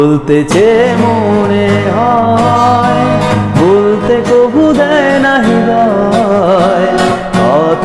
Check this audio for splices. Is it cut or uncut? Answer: uncut